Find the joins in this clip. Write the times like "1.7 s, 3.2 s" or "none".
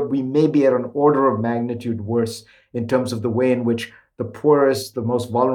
none